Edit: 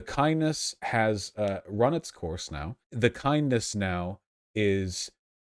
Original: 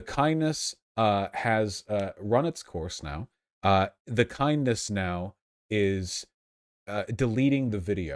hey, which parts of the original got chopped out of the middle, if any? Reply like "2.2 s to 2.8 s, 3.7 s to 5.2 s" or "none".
0.8 s to 1.3 s, 3.4 s to 4.0 s